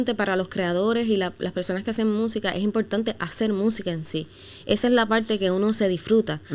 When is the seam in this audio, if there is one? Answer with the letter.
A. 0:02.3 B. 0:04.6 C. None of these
C